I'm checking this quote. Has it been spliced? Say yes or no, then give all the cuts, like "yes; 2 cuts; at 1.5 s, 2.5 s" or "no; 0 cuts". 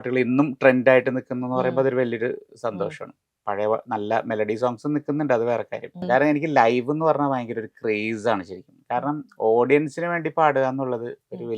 yes; 1 cut; at 5.9 s